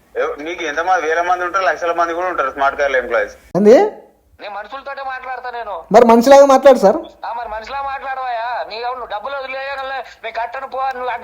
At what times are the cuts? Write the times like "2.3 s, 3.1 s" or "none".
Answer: 3.4 s